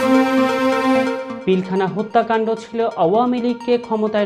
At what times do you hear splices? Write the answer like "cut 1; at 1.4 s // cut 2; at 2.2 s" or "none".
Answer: none